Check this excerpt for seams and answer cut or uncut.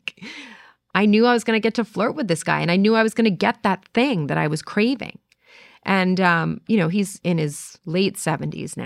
cut